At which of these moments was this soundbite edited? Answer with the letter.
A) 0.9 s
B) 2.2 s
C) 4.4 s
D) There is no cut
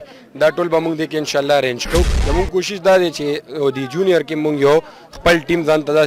B